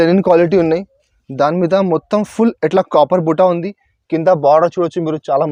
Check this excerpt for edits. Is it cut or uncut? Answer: uncut